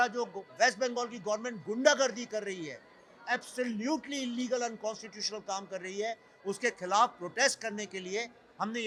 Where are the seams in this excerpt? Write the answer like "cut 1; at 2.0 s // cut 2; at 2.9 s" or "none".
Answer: none